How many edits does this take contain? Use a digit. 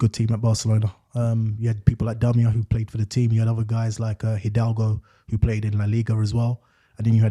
0